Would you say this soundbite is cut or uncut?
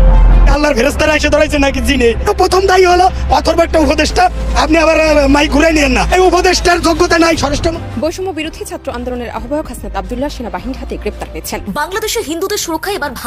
cut